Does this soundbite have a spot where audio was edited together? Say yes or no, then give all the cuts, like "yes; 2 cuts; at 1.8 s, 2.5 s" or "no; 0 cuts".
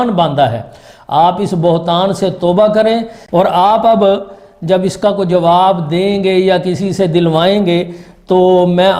yes; 1 cut; at 3.2 s